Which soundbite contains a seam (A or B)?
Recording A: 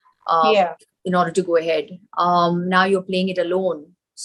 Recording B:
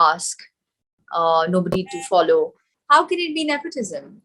B